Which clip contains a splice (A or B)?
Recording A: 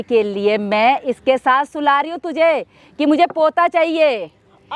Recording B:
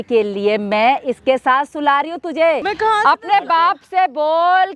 B